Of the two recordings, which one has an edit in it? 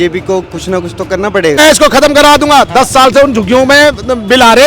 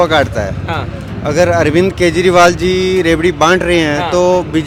first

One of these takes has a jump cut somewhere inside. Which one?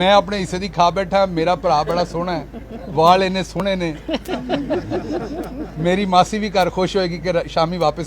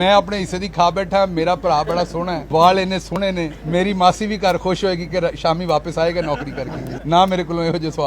second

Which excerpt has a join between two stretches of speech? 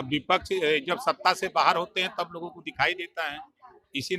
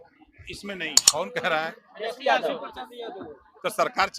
second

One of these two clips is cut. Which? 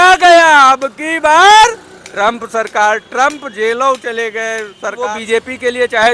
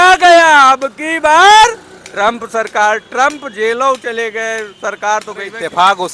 first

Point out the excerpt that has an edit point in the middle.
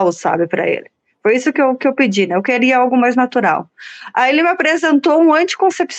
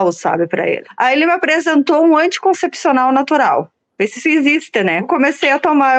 second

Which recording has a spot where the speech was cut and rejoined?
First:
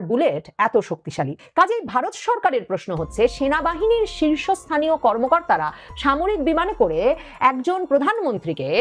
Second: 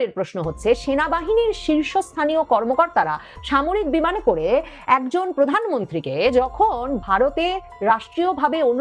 first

